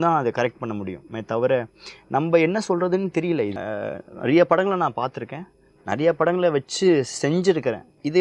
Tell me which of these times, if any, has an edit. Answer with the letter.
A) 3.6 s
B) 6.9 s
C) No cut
A